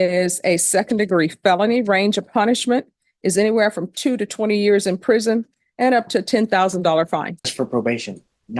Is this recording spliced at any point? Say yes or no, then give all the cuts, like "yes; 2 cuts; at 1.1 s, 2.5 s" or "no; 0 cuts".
yes; 3 cuts; at 1.8 s, 5.6 s, 7.5 s